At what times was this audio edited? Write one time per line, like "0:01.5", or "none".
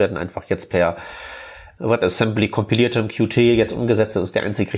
0:01.6